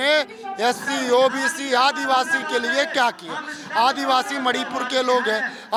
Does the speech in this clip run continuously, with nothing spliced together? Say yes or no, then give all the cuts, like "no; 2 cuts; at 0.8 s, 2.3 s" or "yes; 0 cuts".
yes; 0 cuts